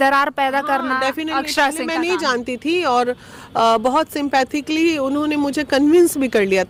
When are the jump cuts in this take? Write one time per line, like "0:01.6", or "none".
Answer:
none